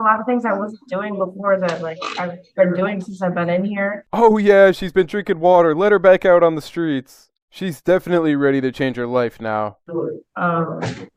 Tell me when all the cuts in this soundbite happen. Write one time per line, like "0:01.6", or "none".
none